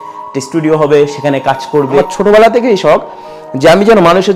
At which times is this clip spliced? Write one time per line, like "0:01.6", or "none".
0:02.0